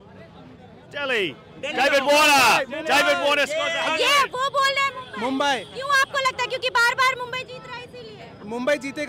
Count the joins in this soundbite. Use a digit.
0